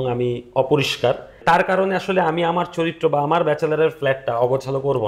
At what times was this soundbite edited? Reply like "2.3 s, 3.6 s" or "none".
1.4 s